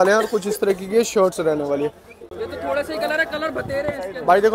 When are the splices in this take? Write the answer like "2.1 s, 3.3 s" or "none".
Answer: 2.1 s